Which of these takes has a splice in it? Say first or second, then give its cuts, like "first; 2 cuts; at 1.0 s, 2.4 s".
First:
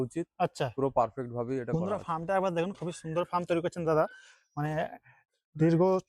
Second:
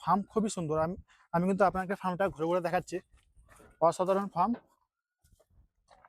first; 1 cut; at 2.0 s